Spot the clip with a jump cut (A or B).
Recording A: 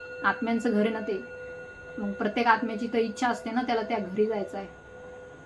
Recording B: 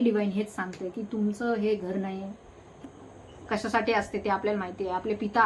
B